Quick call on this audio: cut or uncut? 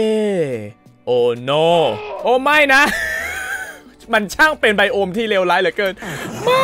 uncut